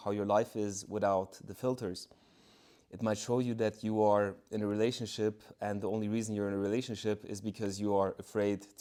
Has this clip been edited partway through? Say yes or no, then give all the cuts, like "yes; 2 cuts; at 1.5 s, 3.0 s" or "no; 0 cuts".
no; 0 cuts